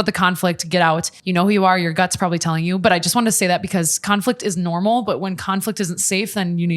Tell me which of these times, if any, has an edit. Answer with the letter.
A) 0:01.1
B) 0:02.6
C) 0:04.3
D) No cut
A